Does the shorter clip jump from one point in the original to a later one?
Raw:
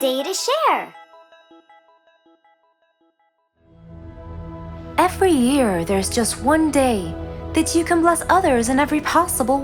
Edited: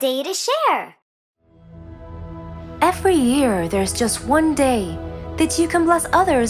yes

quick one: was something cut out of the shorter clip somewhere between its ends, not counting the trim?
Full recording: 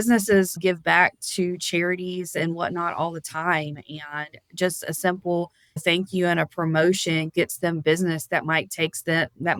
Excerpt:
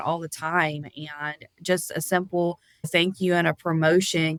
no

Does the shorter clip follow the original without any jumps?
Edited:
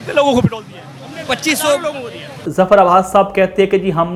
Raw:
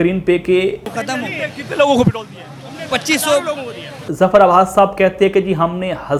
yes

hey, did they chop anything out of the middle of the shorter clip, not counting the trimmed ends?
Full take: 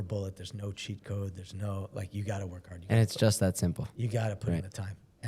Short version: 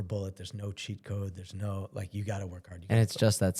no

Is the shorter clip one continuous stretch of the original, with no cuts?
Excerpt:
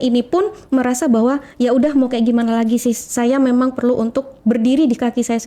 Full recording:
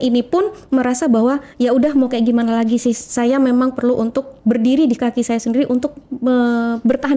yes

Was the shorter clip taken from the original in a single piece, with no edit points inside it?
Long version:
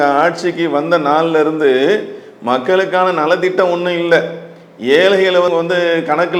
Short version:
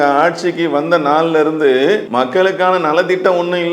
no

